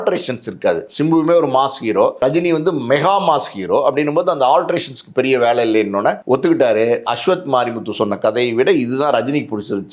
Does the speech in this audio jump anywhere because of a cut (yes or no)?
yes